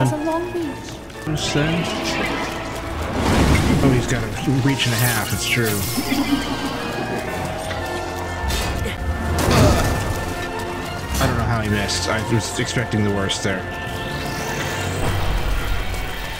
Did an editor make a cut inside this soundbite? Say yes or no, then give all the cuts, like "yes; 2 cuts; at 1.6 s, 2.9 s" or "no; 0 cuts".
yes; 1 cut; at 1.3 s